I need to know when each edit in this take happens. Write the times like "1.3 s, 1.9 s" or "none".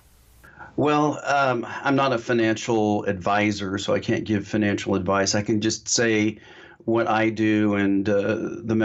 none